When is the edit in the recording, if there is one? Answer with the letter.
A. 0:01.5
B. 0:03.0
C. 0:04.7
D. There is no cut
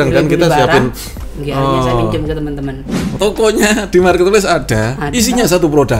B